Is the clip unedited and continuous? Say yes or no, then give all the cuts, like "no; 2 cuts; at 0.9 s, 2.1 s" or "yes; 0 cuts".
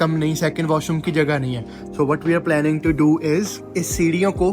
no; 1 cut; at 3.6 s